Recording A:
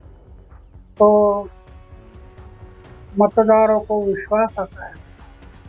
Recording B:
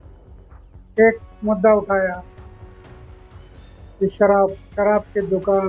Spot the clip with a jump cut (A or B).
B